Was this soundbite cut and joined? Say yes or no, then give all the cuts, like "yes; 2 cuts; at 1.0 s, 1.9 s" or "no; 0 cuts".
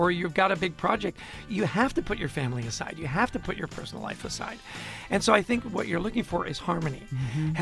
yes; 1 cut; at 1.4 s